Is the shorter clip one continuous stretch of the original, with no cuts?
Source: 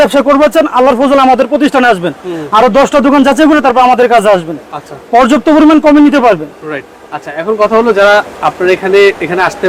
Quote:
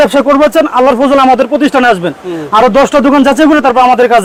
yes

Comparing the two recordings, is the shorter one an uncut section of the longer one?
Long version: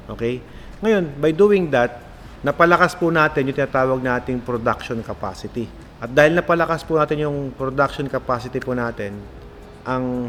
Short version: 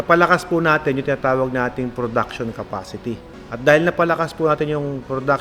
yes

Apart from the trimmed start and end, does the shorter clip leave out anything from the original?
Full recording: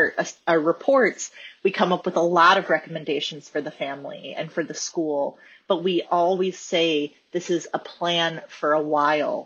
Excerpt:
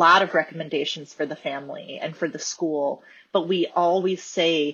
no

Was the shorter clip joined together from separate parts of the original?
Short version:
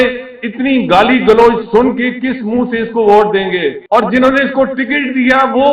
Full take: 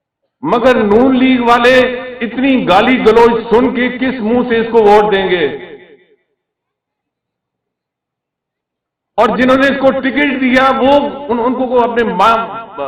yes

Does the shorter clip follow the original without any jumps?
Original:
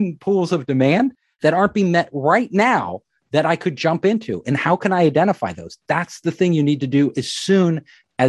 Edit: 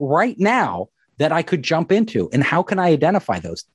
yes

